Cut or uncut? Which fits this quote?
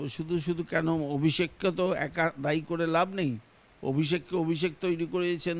uncut